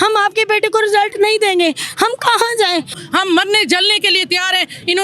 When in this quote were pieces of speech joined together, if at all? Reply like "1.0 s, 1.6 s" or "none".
3.0 s

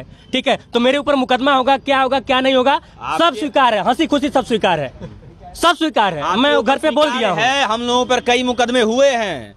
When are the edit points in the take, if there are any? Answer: none

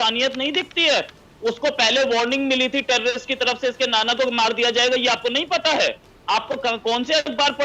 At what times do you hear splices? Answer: none

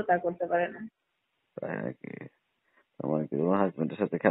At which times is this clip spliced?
none

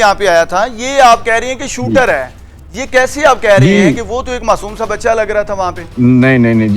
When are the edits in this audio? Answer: 5.8 s

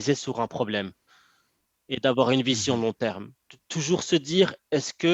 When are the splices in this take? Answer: none

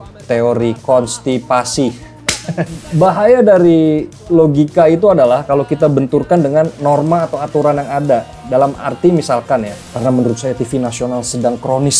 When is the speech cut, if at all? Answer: 2.8 s, 9.8 s

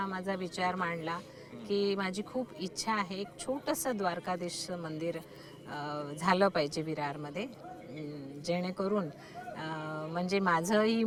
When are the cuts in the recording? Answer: none

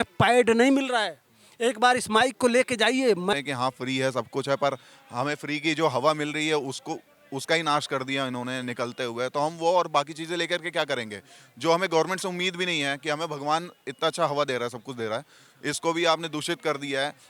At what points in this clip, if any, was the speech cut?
3.3 s

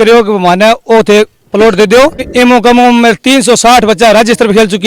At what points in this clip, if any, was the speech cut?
2.3 s

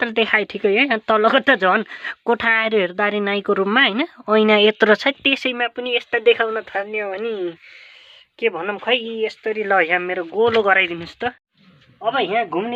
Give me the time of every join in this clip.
none

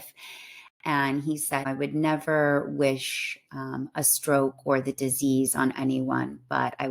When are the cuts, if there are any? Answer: 1.7 s

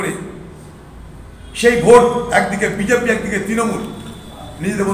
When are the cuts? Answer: none

